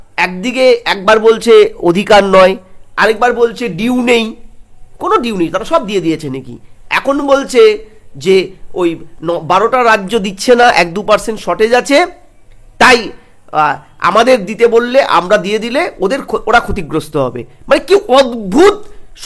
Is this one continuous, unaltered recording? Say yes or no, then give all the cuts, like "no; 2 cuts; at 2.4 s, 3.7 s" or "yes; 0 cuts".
yes; 0 cuts